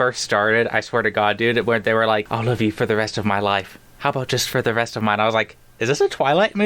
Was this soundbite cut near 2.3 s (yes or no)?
yes